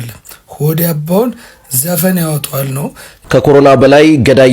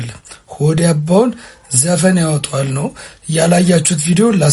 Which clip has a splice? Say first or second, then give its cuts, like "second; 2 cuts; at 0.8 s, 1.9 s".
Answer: first; 1 cut; at 3.1 s